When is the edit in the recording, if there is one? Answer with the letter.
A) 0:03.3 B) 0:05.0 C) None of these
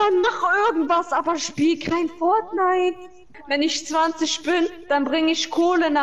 A